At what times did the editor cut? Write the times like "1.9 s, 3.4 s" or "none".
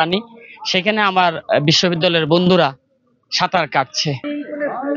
none